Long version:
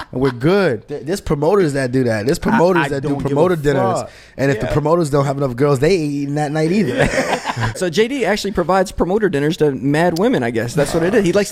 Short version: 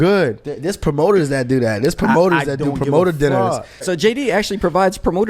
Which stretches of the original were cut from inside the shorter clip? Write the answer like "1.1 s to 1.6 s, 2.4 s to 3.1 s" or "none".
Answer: 4.2 s to 7.7 s